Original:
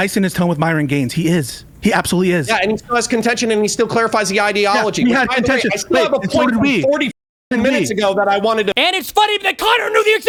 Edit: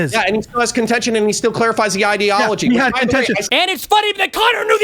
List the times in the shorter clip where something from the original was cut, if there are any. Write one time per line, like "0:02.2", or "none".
0:03.5